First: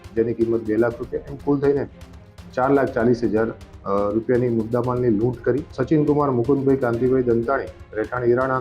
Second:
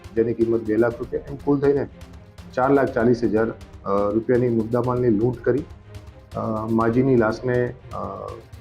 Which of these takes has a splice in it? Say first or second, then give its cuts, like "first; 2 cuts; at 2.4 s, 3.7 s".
first; 1 cut; at 5.7 s